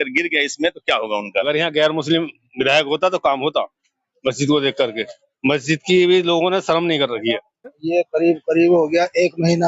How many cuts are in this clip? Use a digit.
2